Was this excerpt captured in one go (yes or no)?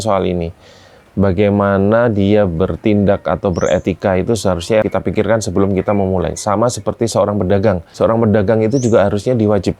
no